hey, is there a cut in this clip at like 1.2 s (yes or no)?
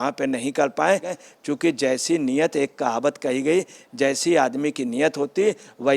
yes